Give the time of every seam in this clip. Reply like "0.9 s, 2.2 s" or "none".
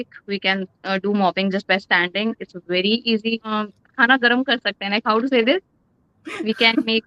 3.5 s